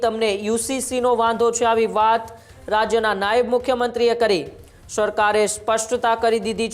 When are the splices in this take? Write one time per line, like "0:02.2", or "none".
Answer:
none